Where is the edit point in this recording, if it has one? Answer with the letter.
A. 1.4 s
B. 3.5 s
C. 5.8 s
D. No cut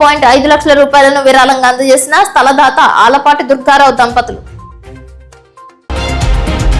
C